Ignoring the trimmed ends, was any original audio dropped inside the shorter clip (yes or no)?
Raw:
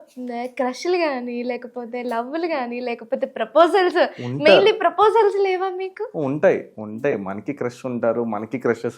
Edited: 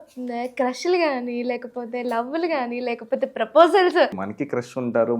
yes